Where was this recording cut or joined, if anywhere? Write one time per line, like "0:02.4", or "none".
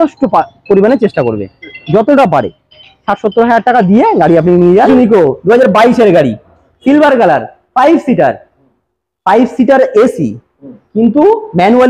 0:04.9